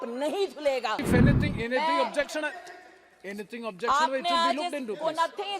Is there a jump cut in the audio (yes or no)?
yes